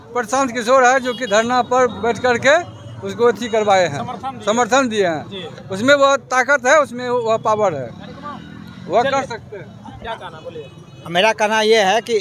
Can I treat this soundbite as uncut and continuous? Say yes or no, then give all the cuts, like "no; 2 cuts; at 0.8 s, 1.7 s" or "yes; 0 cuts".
yes; 0 cuts